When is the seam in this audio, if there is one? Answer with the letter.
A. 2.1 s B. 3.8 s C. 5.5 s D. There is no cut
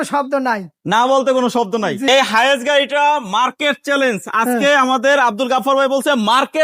A